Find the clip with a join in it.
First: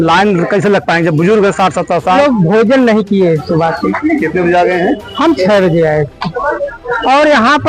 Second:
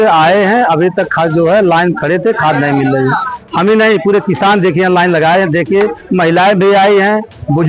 first; 1 cut; at 2.2 s

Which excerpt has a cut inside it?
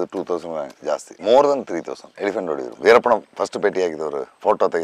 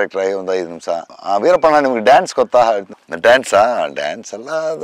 first; 2 cuts; at 1.1 s, 2.6 s

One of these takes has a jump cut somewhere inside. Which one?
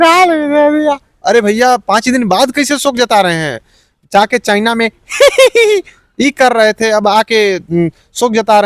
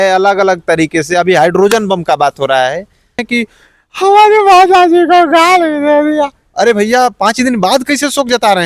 second; 1 cut; at 3.2 s

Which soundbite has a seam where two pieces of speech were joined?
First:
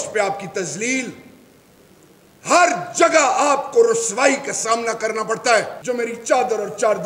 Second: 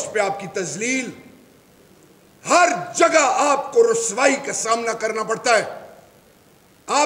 first; 1 cut; at 5.7 s

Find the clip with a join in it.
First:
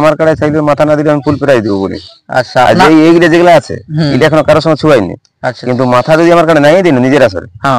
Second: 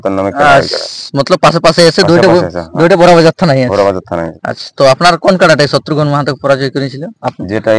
second; 1 cut; at 4.3 s

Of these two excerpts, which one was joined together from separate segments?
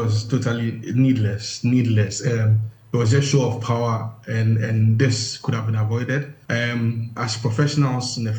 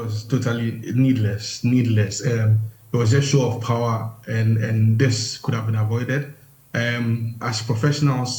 first; 1 cut; at 6.4 s

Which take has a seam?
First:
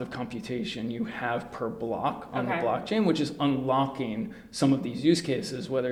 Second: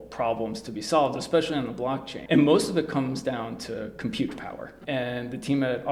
second; 2 cuts; at 2.1 s, 4.7 s

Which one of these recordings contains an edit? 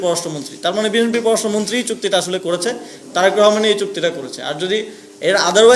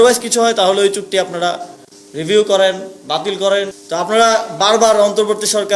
second; 1 cut; at 3.8 s

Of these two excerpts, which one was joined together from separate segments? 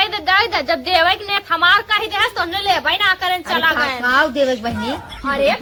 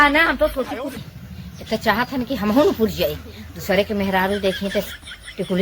second; 1 cut; at 1.0 s

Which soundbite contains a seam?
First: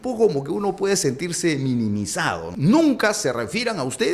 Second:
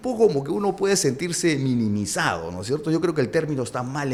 first; 1 cut; at 2.5 s

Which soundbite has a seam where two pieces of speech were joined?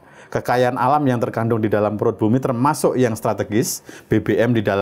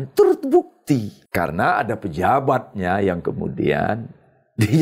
second; 1 cut; at 1.2 s

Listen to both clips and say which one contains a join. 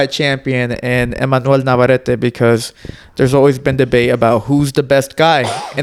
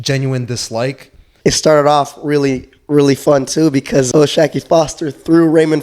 second; 2 cuts; at 1.3 s, 4.1 s

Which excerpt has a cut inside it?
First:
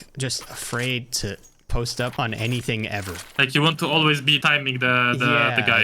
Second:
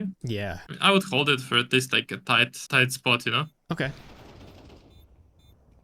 first; 3 cuts; at 2.1 s, 3.2 s, 4.4 s

